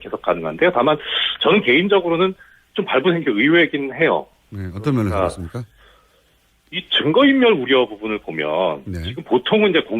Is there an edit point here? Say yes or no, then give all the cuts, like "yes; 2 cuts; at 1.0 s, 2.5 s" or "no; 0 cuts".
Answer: yes; 1 cut; at 1.6 s